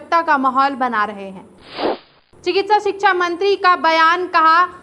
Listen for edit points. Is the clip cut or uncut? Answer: cut